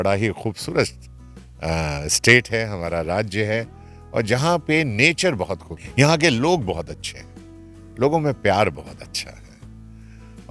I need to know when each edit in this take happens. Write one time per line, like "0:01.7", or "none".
0:05.8